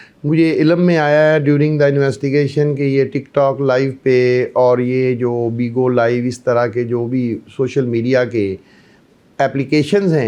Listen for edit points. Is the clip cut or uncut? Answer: uncut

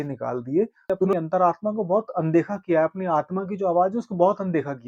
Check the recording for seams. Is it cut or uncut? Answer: cut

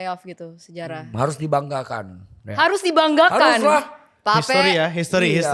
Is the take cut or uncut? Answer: uncut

